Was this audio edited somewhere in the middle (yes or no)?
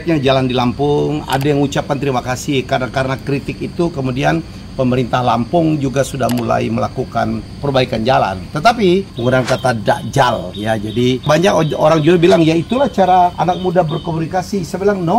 yes